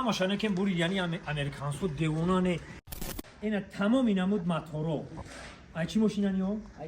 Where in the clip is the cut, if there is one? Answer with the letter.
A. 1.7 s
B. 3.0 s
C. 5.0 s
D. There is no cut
B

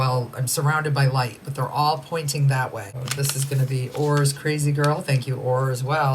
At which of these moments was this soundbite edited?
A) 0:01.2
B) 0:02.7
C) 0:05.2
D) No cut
B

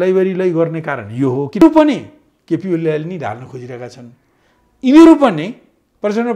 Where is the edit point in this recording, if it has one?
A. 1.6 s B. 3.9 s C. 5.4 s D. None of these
A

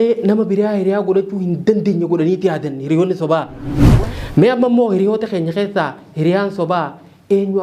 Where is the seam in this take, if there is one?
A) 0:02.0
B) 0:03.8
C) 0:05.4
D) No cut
B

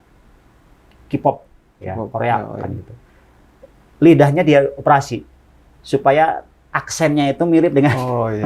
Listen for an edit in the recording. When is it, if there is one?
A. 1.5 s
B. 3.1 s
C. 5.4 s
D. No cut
D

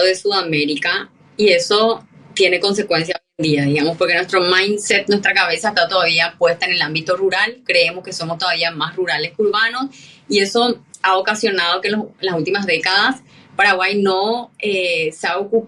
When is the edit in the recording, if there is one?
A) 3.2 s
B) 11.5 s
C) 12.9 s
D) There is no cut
D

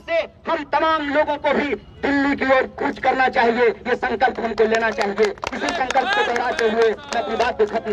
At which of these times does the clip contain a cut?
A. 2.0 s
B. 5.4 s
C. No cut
C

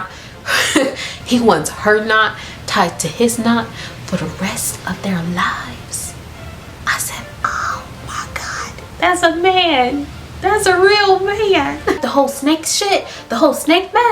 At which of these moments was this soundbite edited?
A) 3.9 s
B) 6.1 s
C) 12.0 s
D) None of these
C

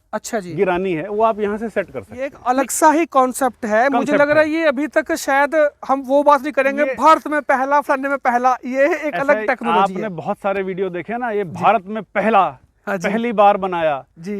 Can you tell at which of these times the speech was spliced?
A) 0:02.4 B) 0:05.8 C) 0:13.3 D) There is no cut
A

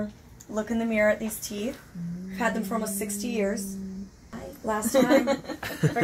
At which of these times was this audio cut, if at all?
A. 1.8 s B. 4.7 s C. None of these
C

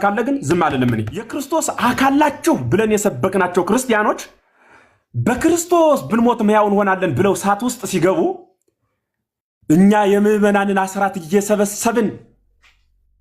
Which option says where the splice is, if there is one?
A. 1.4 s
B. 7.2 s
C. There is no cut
A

